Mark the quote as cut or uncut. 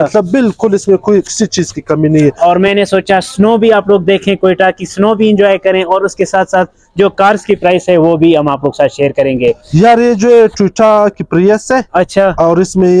cut